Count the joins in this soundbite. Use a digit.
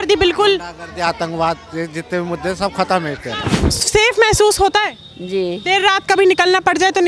2